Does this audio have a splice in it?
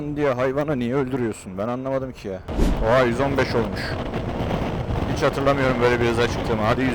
yes; 1 cut; at 2.5 s

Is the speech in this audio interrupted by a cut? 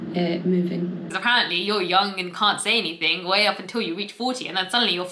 yes; 1 cut; at 1.0 s

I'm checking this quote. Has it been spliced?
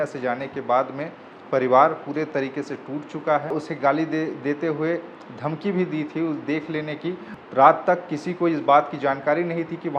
yes; 2 cuts; at 3.5 s, 7.3 s

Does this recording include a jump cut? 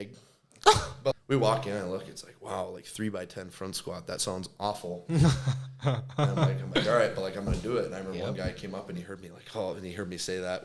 yes; 1 cut; at 1.1 s

